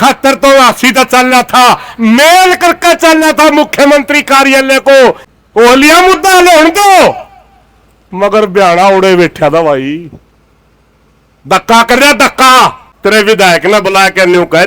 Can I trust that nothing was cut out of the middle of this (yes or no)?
no